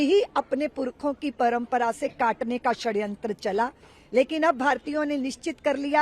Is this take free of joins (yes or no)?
yes